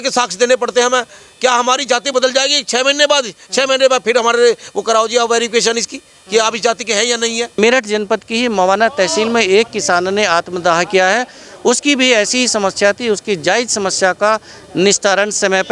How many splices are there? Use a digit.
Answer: 1